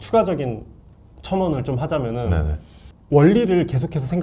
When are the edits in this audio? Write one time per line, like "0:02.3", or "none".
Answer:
none